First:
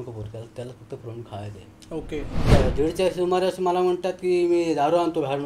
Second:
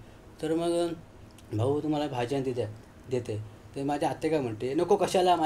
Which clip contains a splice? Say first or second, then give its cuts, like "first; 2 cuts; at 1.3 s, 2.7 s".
first; 1 cut; at 2.5 s